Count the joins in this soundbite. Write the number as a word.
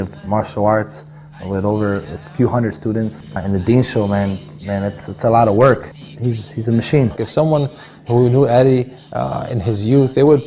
two